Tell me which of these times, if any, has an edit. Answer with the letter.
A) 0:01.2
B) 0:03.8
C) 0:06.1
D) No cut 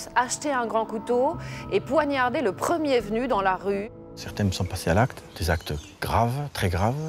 B